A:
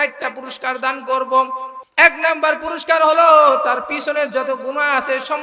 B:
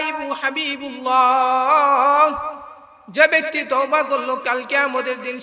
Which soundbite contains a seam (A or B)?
A